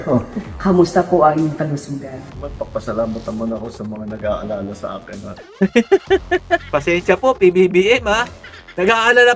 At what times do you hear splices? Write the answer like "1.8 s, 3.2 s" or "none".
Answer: 2.3 s, 6.7 s